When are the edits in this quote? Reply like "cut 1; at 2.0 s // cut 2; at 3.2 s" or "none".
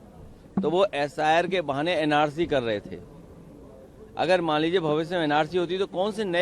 cut 1; at 5.1 s